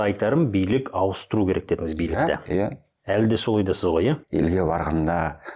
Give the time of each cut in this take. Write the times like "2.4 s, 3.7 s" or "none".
4.2 s